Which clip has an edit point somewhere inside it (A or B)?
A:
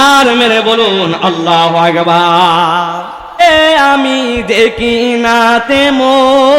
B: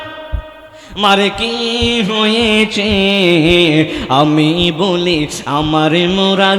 A